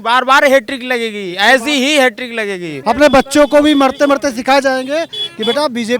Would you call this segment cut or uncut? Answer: cut